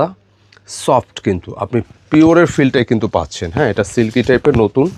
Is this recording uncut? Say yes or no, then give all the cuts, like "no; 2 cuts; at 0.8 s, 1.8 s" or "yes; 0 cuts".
yes; 0 cuts